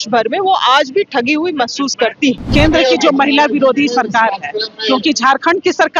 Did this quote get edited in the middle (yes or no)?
yes